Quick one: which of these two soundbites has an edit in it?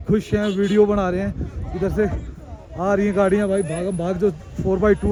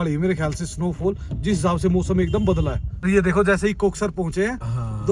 second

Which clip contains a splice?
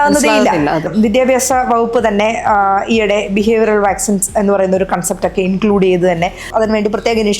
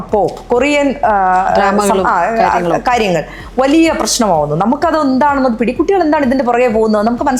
first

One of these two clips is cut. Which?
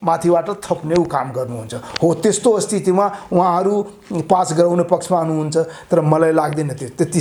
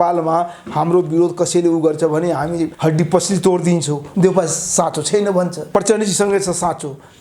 second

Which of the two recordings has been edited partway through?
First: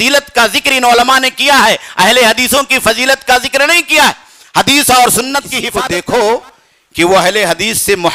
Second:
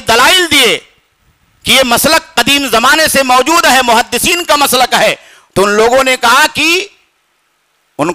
first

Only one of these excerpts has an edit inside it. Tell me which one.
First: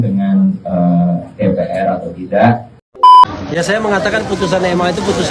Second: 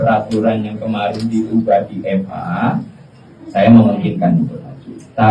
first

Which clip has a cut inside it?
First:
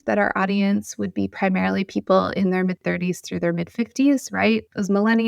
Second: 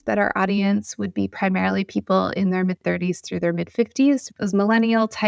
second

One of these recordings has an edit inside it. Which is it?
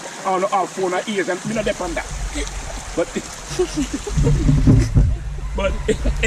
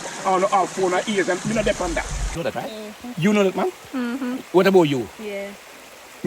second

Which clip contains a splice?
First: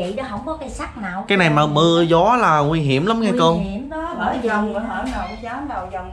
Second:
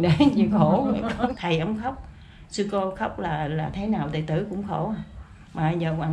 second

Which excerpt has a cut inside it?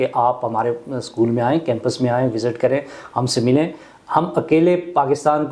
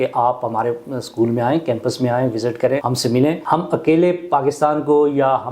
second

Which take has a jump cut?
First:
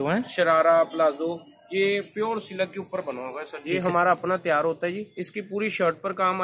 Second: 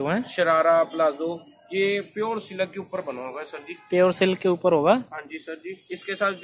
first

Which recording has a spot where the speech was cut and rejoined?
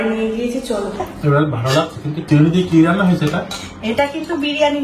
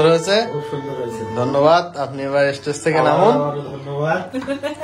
first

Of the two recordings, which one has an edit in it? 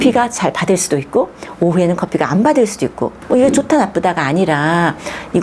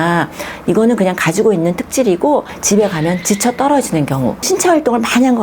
second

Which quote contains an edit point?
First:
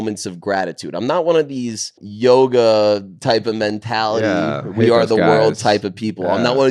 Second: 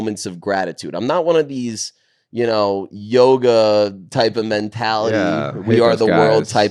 first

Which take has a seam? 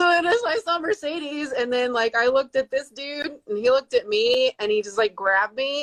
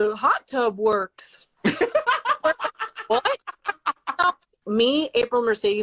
second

